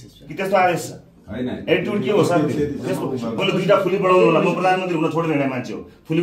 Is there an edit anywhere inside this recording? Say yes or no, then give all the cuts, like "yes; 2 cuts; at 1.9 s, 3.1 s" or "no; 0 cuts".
yes; 1 cut; at 3.4 s